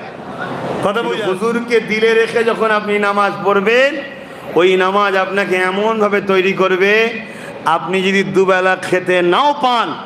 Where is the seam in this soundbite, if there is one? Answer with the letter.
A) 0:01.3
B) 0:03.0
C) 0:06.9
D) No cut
A